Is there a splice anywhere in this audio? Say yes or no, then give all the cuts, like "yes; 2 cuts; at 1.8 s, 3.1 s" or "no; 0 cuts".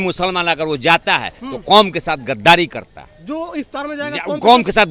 no; 0 cuts